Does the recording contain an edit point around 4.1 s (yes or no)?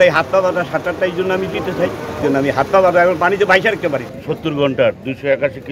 yes